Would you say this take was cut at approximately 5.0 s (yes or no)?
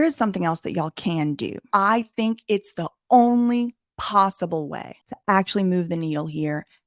no